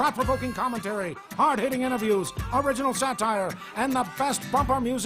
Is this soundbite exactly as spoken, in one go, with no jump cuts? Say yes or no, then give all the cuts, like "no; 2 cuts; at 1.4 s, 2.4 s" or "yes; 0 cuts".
no; 3 cuts; at 1.2 s, 2.4 s, 3.6 s